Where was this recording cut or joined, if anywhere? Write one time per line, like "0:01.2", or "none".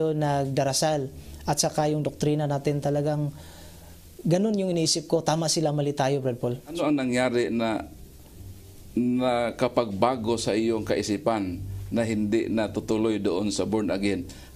0:06.8